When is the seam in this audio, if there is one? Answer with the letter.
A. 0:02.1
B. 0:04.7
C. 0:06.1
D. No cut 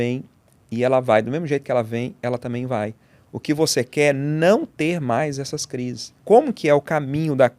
C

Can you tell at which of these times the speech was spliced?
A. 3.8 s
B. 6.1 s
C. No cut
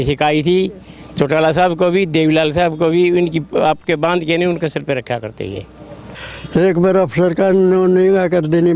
B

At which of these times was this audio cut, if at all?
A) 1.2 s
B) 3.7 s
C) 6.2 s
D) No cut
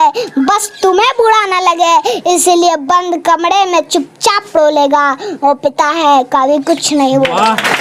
D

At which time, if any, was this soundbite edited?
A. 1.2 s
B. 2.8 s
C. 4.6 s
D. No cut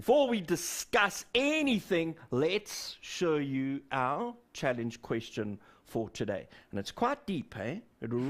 A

